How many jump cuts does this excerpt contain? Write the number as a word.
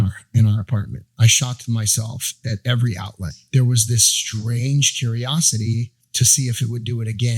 four